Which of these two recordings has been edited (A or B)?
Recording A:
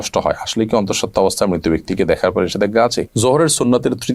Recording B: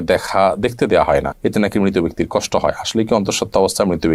A